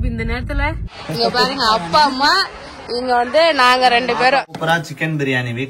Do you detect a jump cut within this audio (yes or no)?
yes